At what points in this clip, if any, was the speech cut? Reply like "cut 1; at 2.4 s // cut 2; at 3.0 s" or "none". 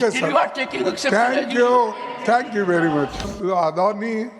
cut 1; at 3.3 s